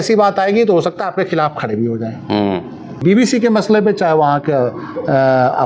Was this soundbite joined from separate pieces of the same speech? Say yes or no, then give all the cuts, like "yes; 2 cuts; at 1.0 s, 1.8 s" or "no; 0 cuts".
yes; 1 cut; at 3.0 s